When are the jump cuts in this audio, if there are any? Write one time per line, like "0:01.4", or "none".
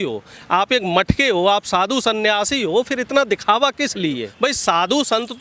0:04.3